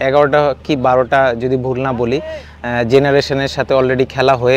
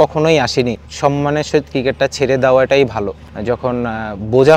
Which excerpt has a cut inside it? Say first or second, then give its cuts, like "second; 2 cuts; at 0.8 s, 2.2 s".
second; 2 cuts; at 0.8 s, 3.3 s